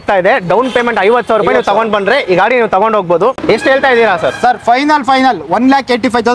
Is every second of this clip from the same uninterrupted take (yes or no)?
no